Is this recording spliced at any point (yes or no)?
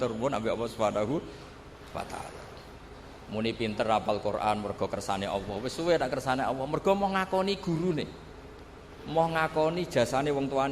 no